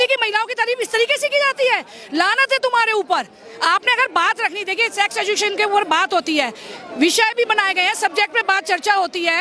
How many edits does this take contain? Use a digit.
0